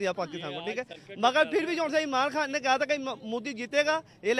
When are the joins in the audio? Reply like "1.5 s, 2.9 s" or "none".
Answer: none

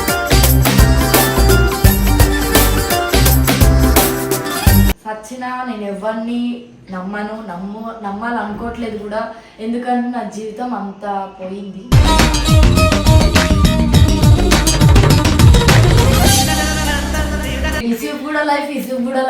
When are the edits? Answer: 5.1 s, 17.8 s

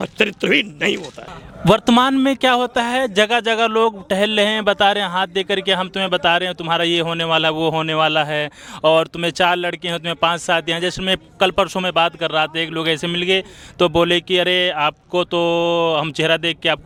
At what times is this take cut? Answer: none

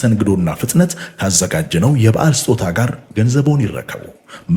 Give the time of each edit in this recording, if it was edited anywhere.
none

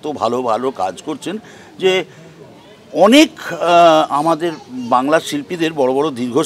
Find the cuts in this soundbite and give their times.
none

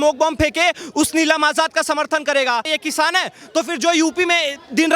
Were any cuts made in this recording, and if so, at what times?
2.7 s

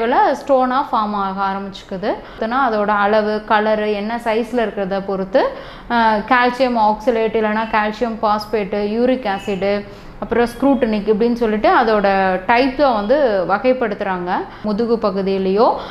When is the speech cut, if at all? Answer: 2.4 s, 14.6 s

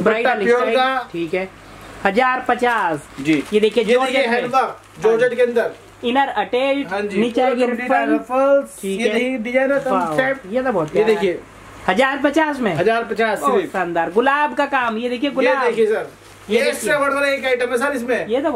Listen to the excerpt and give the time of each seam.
none

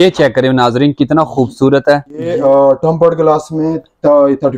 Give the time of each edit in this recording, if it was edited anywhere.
2.3 s

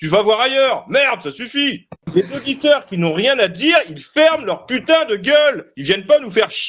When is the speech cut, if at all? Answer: 2.0 s

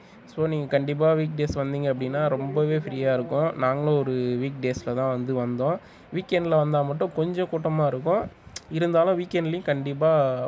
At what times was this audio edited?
none

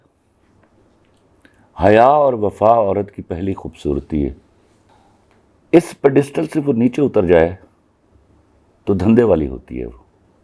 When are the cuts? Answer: none

